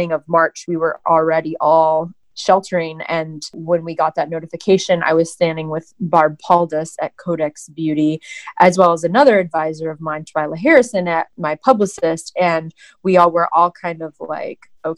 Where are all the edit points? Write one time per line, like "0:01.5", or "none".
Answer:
0:02.2
0:03.6
0:11.3